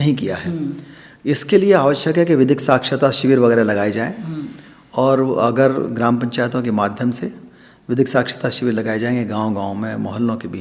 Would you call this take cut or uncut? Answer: uncut